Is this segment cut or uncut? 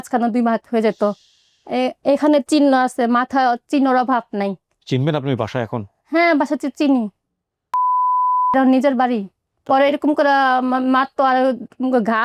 uncut